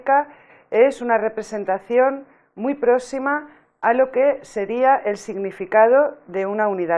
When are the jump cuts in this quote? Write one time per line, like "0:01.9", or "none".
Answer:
0:01.8